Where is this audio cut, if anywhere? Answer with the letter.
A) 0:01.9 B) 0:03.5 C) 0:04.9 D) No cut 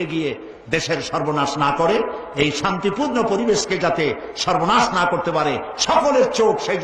D